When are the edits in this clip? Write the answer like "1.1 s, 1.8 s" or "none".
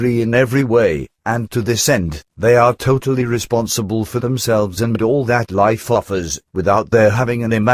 2.8 s